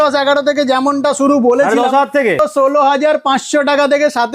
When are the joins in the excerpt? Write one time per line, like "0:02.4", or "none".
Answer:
0:02.4